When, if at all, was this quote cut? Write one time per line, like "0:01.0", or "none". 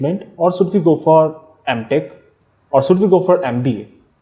none